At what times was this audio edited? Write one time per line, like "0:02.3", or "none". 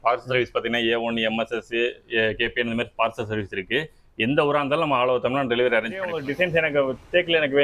0:06.2